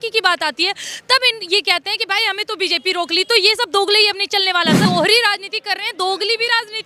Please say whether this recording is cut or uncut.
cut